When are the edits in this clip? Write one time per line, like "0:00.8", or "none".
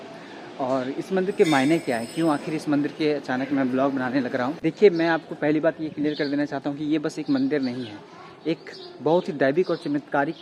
none